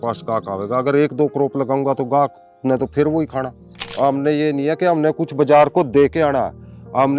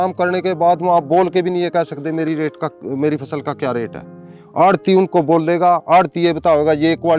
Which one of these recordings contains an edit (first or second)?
first